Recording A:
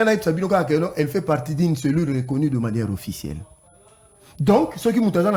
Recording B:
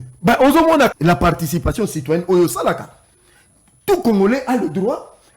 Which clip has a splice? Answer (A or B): B